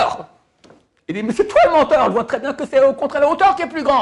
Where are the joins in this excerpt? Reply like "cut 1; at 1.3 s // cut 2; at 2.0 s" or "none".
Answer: none